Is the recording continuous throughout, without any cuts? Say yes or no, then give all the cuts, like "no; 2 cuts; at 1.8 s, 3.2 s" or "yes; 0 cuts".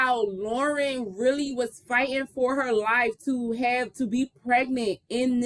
yes; 0 cuts